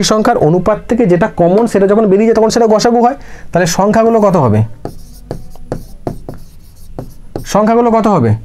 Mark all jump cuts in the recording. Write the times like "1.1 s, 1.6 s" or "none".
none